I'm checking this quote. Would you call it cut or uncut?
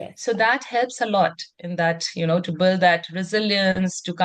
uncut